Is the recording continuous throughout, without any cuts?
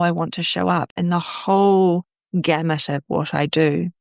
yes; 0 cuts

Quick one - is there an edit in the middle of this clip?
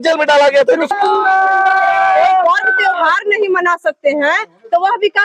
yes; 1 cut; at 0.9 s

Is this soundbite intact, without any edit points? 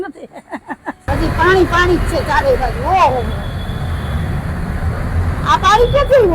no; 1 cut; at 1.1 s

